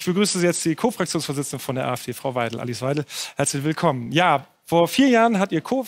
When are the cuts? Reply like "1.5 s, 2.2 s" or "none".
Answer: 4.0 s

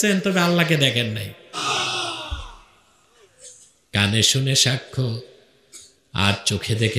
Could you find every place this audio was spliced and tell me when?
1.6 s

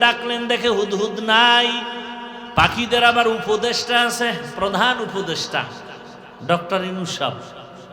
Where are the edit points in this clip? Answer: 2.4 s

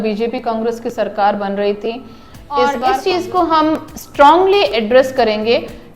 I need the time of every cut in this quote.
2.8 s

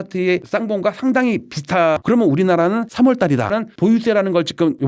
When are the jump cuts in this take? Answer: 2.0 s, 3.5 s

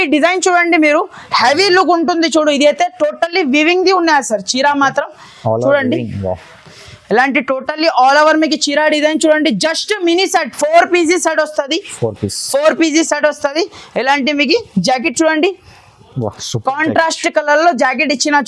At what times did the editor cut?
none

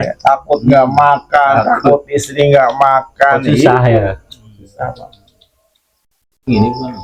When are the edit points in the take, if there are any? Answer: none

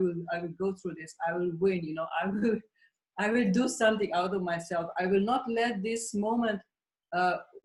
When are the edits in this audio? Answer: none

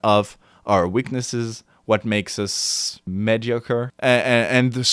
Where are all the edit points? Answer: 3.1 s, 3.9 s

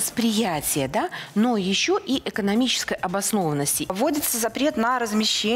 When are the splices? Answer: 3.9 s

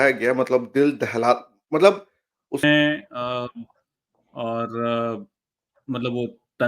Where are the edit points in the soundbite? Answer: 2.6 s

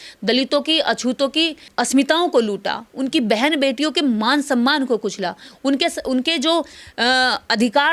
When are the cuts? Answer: none

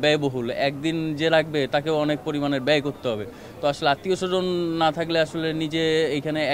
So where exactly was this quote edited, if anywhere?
none

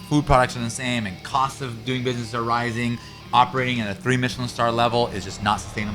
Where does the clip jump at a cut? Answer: 3.1 s

